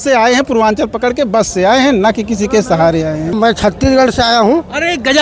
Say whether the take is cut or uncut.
cut